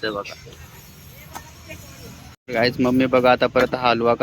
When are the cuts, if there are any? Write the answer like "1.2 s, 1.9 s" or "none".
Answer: 2.2 s